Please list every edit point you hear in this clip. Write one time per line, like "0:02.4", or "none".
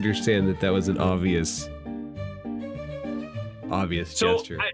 0:02.0
0:03.7